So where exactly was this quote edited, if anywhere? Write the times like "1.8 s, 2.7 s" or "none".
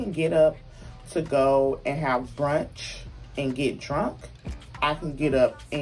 none